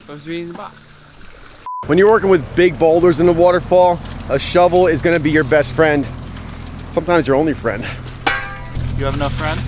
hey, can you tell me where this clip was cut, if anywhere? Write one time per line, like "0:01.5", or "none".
0:01.8